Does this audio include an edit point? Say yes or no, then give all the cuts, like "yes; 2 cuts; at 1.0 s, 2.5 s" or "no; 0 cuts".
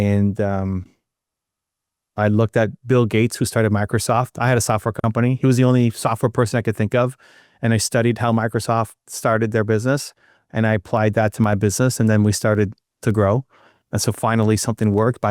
no; 0 cuts